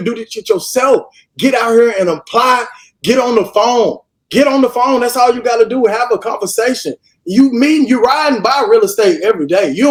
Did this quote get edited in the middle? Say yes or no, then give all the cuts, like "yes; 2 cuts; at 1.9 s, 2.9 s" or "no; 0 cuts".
no; 0 cuts